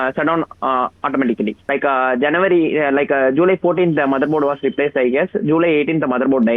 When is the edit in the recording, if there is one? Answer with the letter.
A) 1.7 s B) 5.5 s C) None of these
A